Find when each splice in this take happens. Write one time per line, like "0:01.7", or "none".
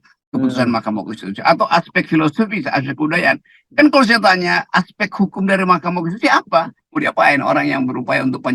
0:06.8